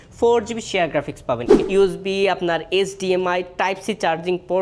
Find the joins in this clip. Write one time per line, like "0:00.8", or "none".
0:01.5